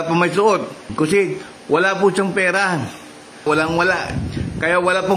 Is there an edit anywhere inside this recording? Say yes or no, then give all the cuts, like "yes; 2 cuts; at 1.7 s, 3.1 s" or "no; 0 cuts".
yes; 2 cuts; at 0.9 s, 3.4 s